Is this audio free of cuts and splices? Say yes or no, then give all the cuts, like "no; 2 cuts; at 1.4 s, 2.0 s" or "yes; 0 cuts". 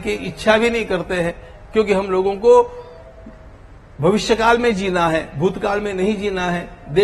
yes; 0 cuts